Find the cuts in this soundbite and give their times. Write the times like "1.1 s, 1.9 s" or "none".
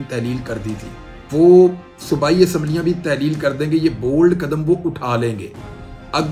1.3 s